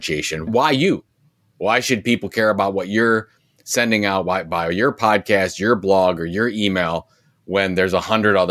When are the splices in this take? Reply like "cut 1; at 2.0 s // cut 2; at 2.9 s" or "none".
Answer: none